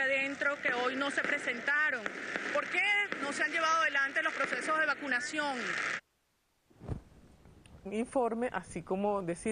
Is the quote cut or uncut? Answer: uncut